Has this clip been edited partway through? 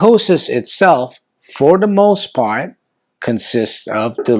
no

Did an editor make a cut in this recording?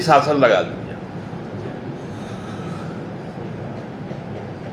no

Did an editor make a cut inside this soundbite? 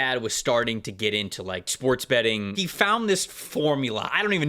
yes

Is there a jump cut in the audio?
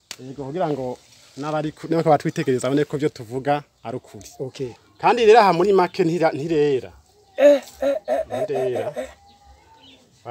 yes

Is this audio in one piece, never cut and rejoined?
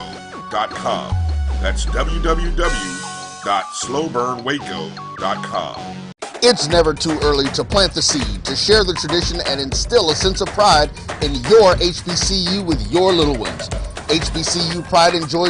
no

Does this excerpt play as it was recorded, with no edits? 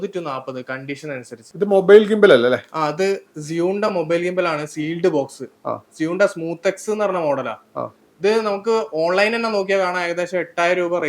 yes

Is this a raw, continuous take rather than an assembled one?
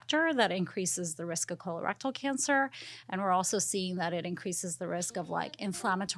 yes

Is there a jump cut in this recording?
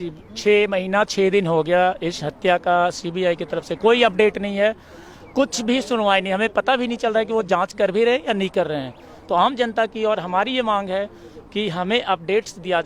no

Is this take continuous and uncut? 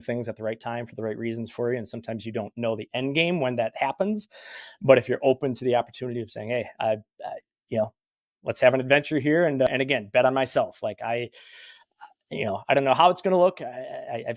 no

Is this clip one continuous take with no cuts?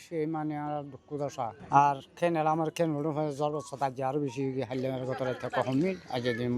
no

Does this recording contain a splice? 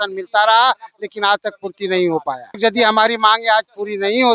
yes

